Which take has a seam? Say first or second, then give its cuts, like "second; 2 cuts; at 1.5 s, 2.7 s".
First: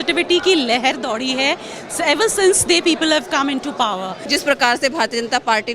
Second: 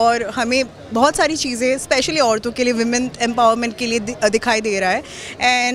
first; 1 cut; at 4.1 s